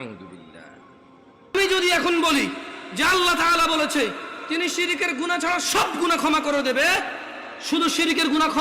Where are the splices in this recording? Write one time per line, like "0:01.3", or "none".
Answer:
0:01.3